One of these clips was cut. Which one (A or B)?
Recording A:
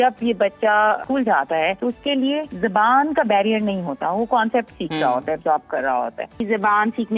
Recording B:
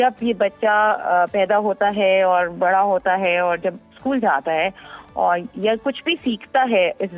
A